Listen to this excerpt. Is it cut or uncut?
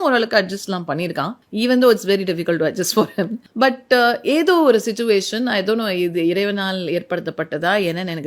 cut